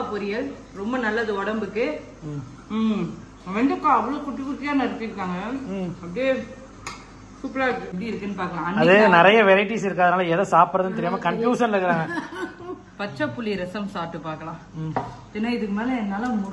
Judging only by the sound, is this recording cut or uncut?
cut